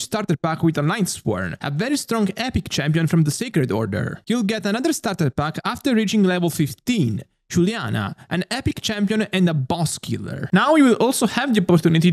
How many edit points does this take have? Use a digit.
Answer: 1